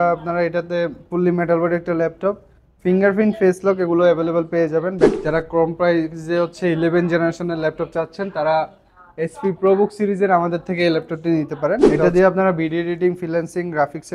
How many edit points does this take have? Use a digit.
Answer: 2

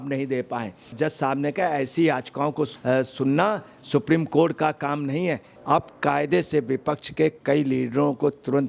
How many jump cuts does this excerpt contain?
2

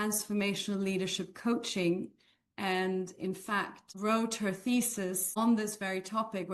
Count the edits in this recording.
2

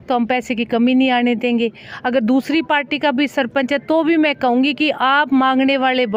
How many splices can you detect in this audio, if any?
0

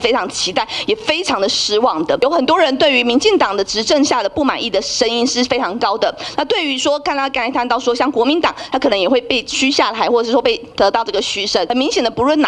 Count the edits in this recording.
2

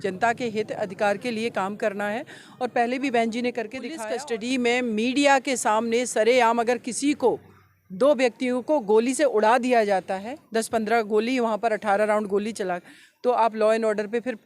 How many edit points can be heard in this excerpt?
1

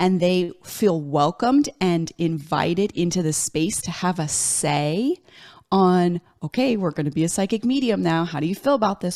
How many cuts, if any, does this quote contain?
0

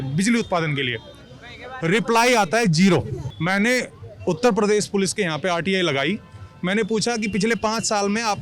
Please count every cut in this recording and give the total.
1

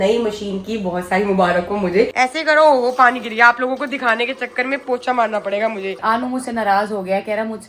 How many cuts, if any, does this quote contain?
2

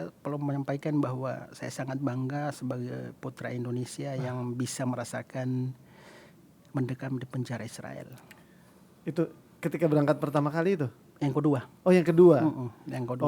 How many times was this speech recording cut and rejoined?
0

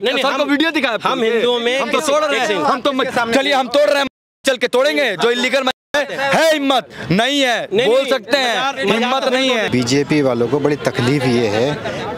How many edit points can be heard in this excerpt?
1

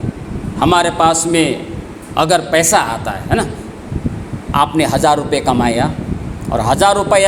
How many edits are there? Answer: 0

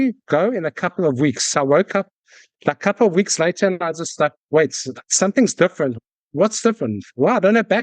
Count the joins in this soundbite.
1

